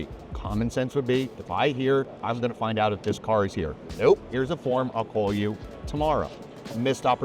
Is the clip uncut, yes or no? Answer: yes